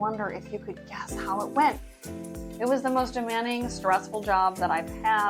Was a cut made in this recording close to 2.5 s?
yes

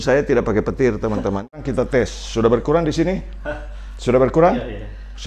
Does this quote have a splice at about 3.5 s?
no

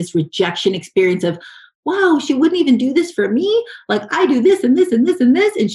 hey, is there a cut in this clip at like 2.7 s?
no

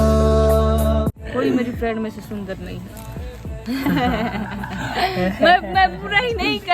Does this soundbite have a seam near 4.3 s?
no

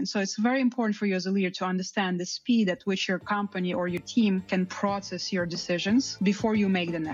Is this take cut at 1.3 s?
no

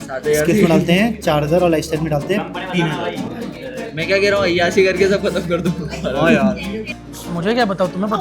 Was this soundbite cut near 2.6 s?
no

